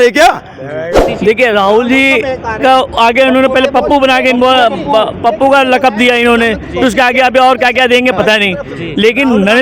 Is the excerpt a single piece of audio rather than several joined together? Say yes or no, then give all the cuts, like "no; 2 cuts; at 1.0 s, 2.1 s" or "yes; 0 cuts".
no; 1 cut; at 1.1 s